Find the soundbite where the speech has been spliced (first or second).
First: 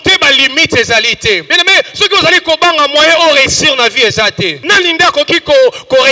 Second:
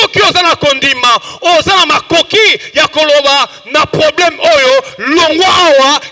first